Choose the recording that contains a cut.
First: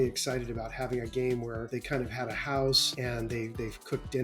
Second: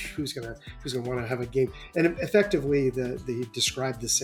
first; 2 cuts; at 1.6 s, 2.9 s

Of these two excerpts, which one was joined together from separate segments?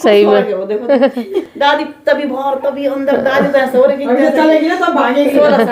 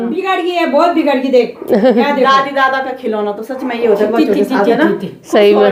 first; 1 cut; at 1.4 s

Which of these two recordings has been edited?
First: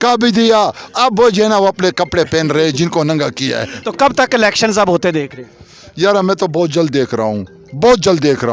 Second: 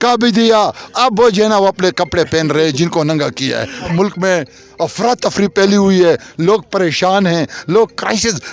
second; 1 cut; at 3.9 s

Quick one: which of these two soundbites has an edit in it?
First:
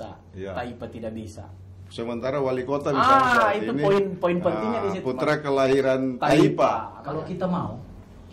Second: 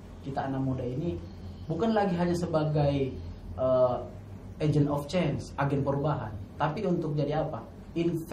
first; 1 cut; at 6.9 s

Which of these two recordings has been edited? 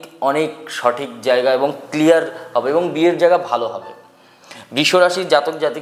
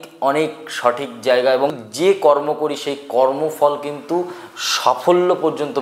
second; 1 cut; at 1.8 s

